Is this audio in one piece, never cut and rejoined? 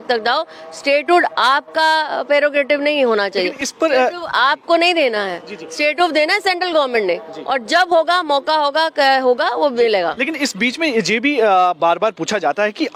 yes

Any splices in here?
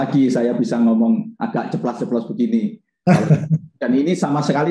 no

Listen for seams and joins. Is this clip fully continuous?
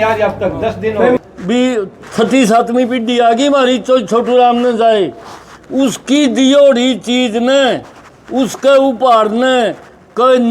no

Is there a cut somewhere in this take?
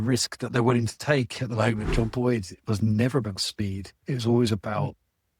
yes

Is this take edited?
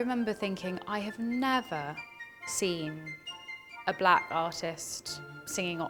no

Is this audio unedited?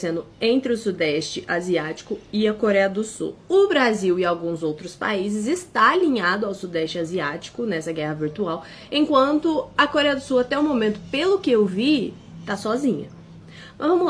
yes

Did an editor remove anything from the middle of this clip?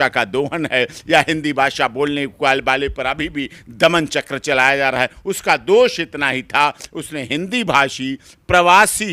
no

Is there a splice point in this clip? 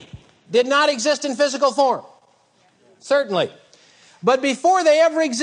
no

